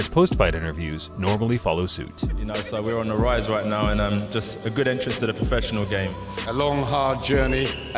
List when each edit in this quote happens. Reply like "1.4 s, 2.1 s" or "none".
6.4 s